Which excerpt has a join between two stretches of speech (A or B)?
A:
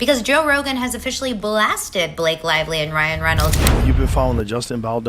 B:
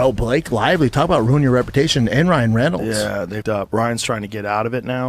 A